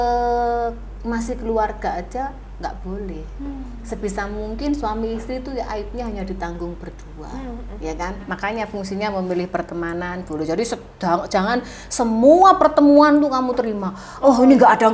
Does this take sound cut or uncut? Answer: cut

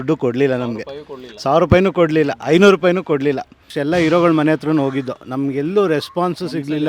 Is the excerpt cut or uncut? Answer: cut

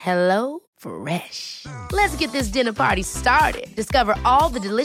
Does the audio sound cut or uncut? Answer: uncut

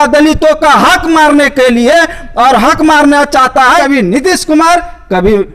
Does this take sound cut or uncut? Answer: cut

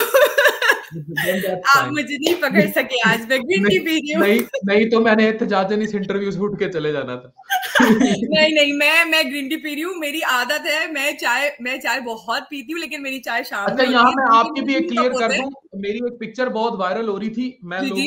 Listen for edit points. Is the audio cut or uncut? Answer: uncut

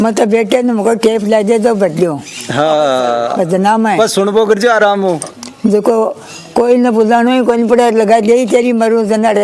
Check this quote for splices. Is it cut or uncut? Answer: uncut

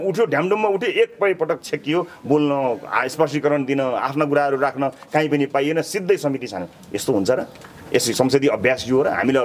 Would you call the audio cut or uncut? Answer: uncut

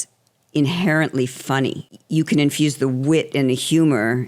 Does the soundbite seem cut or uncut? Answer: cut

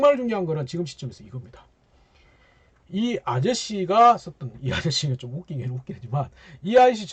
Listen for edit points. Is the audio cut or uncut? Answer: uncut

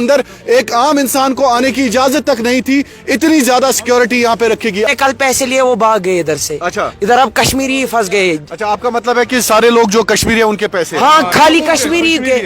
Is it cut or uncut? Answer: cut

